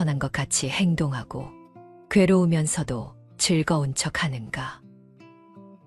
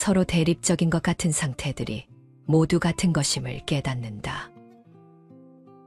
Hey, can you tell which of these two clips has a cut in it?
first; 1 cut; at 4.8 s

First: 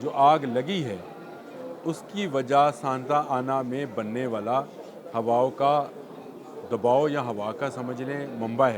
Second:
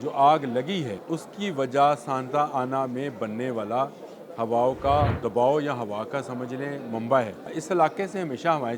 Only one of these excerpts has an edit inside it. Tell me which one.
second; 3 cuts; at 1.0 s, 5.2 s, 7.6 s

